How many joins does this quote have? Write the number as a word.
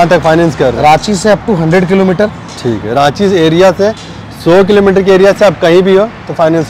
zero